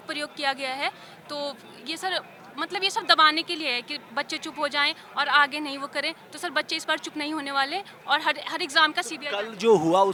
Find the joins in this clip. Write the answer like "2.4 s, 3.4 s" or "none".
none